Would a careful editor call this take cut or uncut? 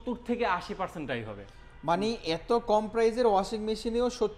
uncut